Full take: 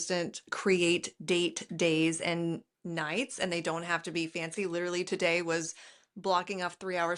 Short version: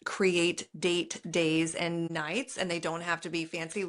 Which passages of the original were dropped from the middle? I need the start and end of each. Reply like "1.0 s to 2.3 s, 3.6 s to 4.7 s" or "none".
2.6 s to 2.9 s